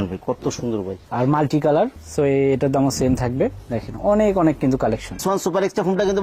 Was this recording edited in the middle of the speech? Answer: yes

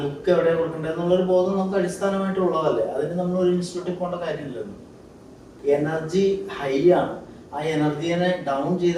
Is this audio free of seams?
no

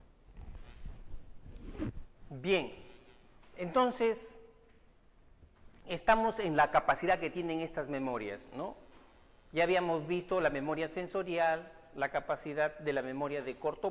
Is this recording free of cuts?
yes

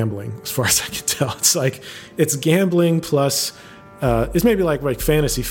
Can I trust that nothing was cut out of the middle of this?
yes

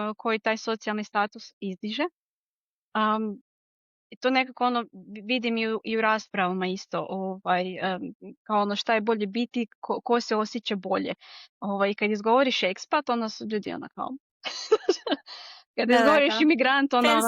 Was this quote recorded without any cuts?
yes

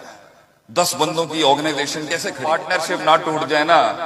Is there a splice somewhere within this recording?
yes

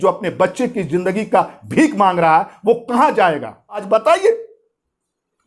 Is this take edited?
yes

